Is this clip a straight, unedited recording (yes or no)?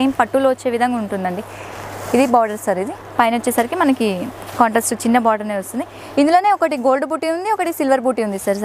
yes